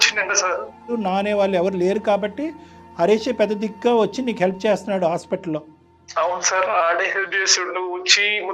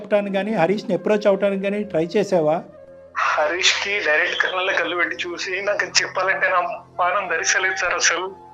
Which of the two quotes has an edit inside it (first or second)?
first